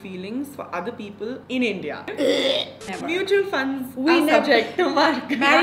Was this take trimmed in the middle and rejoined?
yes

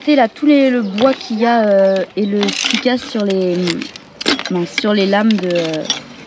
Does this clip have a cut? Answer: no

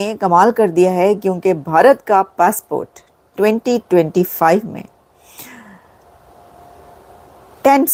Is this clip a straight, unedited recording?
yes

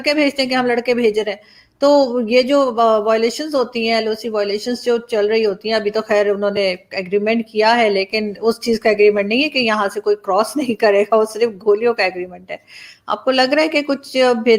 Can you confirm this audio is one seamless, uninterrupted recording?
yes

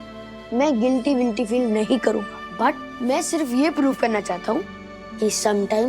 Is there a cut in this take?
yes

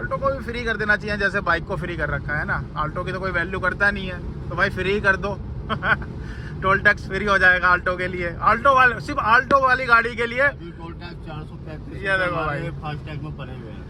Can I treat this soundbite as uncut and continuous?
yes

